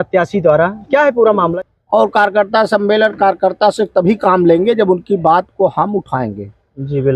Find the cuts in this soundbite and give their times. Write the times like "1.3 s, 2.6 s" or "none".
1.5 s